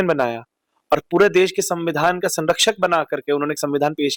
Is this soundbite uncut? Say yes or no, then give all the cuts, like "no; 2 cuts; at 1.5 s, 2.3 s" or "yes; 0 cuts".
yes; 0 cuts